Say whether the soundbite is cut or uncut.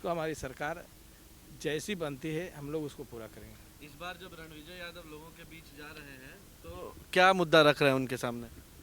uncut